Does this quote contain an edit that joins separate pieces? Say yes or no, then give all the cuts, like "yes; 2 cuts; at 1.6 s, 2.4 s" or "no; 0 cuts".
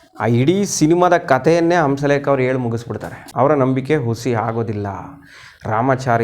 yes; 1 cut; at 3.2 s